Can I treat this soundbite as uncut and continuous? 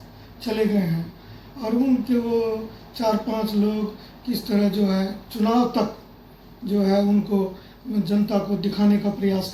yes; 0 cuts

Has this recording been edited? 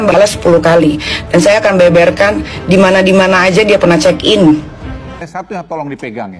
yes; 1 cut; at 5.1 s

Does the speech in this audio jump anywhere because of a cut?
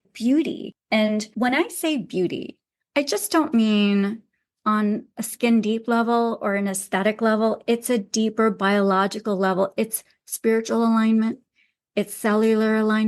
yes; 1 cut; at 1.0 s

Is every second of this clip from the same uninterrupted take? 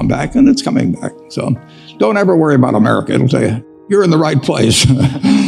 no; 1 cut; at 3.8 s

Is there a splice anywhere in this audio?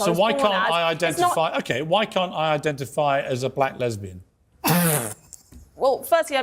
no; 0 cuts

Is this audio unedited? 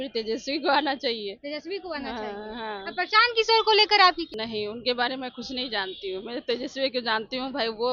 no; 1 cut; at 4.3 s

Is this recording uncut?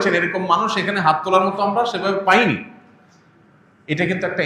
yes; 0 cuts

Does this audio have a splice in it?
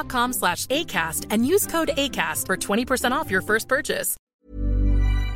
yes; 1 cut; at 4.5 s

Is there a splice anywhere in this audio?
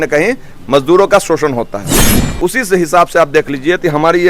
yes; 1 cut; at 2.1 s

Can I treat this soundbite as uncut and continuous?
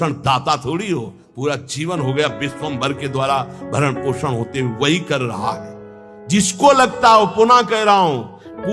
yes; 0 cuts

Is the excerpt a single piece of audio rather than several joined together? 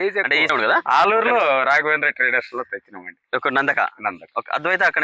yes; 0 cuts

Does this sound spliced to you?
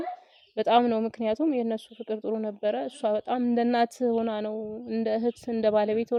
no; 0 cuts

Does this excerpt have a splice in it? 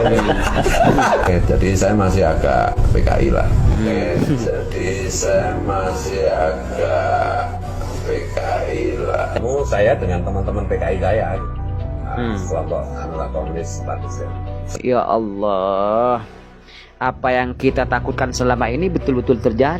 yes; 2 cuts; at 9.4 s, 14.7 s

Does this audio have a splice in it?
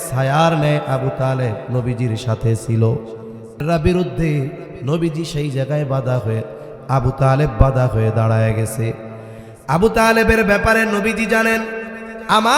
yes; 1 cut; at 3.6 s

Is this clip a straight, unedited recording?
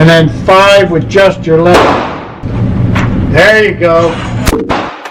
no; 1 cut; at 2.4 s

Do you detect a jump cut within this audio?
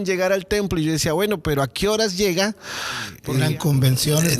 yes; 1 cut; at 3.2 s

